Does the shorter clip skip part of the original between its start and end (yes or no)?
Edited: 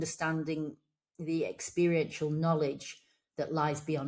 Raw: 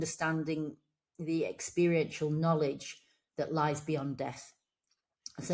no